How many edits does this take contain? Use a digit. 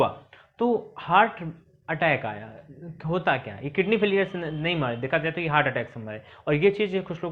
0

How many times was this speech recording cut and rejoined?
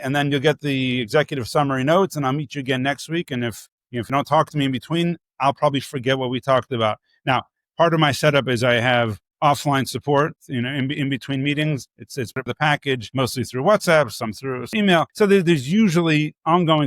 2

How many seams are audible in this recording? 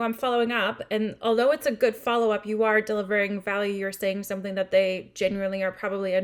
0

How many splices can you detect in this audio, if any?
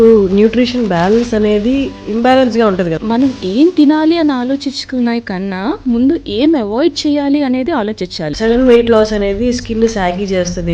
3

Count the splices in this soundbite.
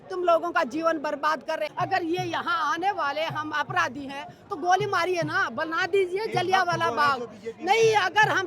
1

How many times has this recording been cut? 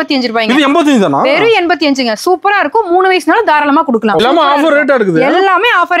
1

